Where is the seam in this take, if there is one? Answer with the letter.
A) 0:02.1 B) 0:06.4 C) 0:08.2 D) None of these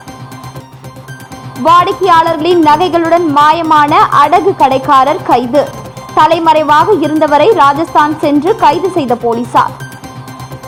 D